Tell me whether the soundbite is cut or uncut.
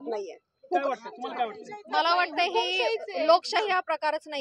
uncut